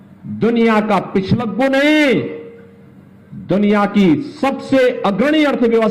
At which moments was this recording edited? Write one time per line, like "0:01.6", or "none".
none